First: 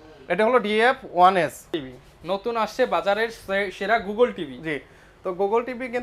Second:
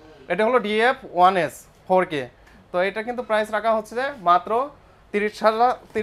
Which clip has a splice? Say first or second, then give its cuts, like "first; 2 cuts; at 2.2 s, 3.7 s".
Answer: first; 1 cut; at 1.8 s